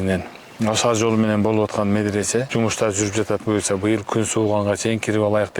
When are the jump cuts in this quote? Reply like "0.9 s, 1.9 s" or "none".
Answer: 2.5 s